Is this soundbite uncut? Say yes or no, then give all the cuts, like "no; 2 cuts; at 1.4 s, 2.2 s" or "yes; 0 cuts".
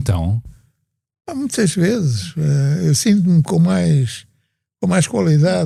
yes; 0 cuts